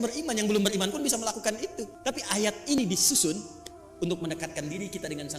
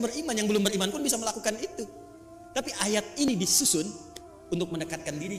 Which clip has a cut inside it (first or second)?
first